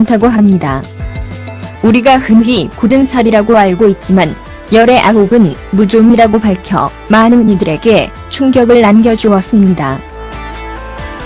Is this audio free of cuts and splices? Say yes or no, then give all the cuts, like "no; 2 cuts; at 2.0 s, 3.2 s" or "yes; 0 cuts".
yes; 0 cuts